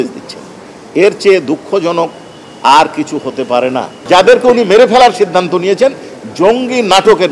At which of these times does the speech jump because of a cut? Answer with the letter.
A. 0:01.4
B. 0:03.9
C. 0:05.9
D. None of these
B